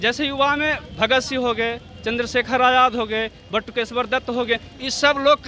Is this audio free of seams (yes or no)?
yes